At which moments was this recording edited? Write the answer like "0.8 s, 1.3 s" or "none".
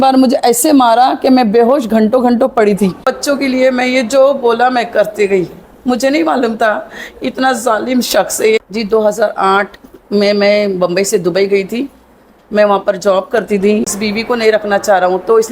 3.0 s, 8.7 s, 13.9 s